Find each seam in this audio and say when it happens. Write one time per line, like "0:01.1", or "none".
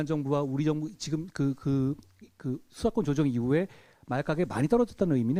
none